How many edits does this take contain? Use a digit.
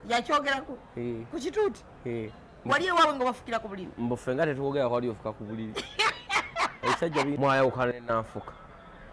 1